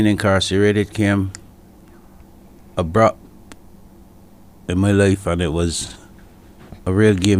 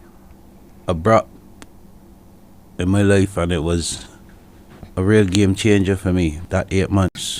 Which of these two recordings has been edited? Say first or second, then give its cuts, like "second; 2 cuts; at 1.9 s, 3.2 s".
second; 1 cut; at 6.4 s